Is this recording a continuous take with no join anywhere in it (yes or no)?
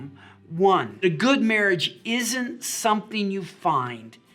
no